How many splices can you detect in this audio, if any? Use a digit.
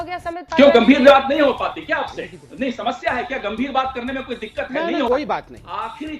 1